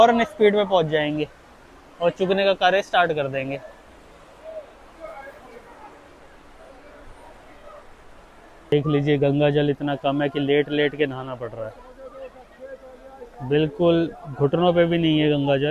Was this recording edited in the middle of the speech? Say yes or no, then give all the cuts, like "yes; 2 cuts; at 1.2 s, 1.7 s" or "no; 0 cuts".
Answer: no; 0 cuts